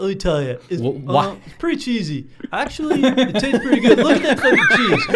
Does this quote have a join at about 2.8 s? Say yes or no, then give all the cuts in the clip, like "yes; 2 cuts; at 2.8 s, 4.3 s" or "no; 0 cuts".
no; 0 cuts